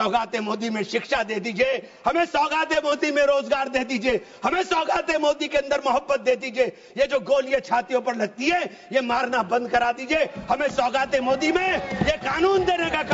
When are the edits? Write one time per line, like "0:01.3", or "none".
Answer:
none